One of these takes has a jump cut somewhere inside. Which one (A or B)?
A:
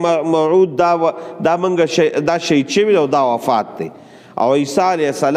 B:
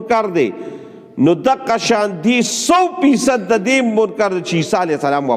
B